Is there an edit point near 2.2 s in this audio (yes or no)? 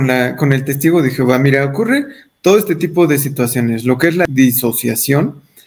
no